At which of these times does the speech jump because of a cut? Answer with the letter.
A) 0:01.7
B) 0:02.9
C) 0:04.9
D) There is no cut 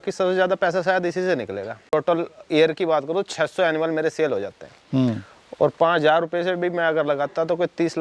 A